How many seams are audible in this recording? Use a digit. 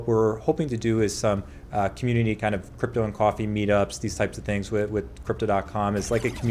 0